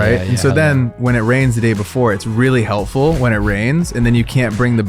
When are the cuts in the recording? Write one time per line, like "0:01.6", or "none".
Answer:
none